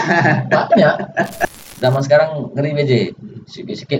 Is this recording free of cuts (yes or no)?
no